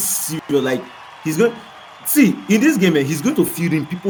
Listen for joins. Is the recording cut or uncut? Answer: uncut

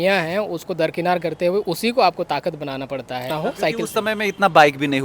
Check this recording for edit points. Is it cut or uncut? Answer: cut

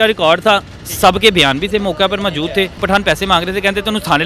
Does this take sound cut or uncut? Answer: cut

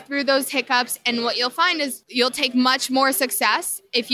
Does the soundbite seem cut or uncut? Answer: cut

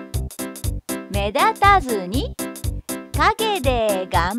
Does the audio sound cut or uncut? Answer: cut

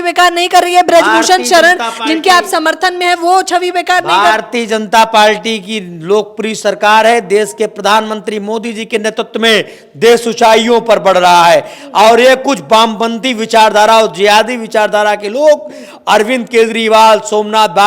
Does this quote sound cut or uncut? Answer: uncut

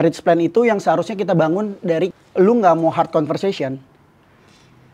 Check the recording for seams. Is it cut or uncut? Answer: cut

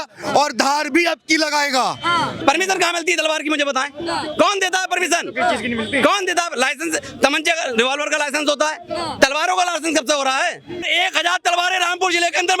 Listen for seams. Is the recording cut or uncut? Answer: cut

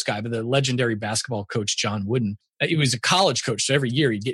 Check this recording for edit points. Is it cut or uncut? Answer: cut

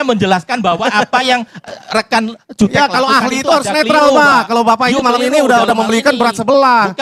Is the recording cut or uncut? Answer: uncut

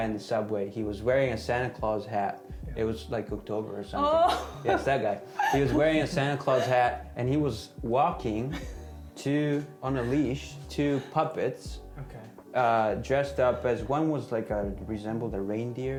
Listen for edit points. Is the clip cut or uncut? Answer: uncut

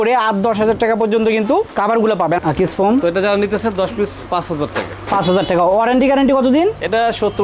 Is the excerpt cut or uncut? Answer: cut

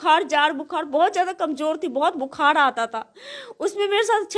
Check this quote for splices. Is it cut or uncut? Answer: uncut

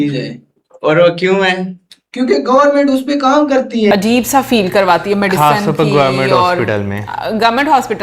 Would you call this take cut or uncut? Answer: cut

